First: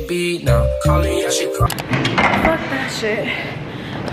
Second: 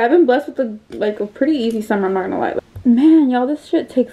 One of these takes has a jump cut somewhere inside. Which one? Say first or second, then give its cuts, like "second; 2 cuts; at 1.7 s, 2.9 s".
second; 1 cut; at 2.5 s